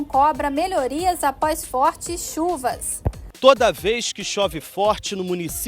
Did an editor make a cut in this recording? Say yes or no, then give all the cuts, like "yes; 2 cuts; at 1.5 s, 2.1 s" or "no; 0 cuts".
yes; 1 cut; at 3.3 s